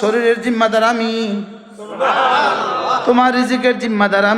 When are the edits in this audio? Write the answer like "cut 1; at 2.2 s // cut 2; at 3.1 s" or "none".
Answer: none